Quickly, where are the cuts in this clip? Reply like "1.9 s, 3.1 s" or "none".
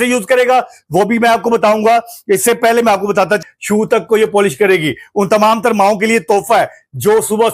3.4 s